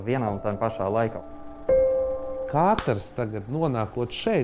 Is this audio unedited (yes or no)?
no